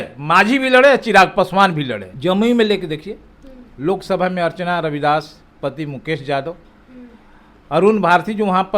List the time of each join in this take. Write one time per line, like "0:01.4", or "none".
0:02.0